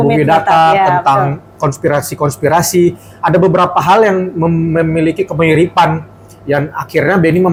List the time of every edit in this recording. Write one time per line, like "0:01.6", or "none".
none